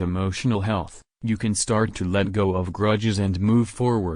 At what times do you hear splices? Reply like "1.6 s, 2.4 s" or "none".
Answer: 1.0 s